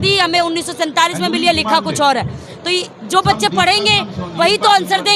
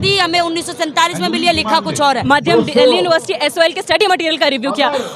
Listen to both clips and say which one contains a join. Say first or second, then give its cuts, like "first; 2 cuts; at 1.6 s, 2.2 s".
second; 1 cut; at 2.2 s